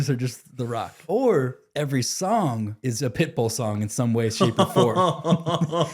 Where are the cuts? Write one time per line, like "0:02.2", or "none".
0:00.9
0:01.6
0:02.7